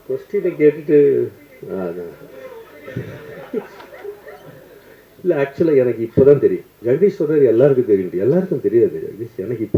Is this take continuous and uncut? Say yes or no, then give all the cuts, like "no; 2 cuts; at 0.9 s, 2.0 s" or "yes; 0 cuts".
no; 1 cut; at 6.7 s